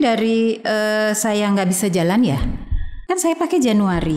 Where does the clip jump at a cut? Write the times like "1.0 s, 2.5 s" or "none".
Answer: 3.0 s